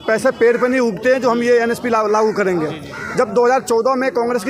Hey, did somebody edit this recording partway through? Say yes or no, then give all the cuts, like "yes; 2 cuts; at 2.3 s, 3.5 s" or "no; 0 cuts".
no; 0 cuts